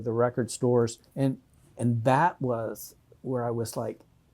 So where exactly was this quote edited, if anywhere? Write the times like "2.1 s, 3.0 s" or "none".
1.0 s